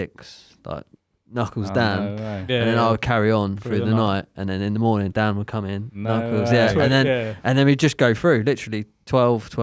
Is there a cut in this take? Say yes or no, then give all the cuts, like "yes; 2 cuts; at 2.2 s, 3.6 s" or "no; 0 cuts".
no; 0 cuts